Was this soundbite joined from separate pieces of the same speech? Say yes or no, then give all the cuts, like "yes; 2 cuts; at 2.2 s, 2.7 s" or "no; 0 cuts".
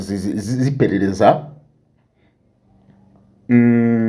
no; 0 cuts